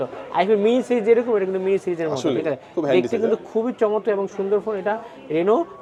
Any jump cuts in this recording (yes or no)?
no